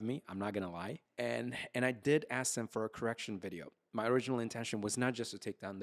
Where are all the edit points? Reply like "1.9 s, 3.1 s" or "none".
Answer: 1.0 s